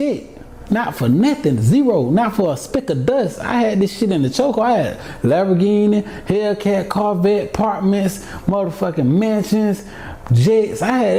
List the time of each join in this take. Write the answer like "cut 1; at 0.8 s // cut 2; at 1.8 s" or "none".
none